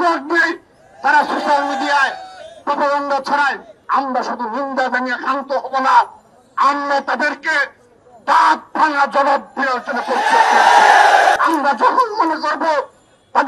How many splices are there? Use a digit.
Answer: 2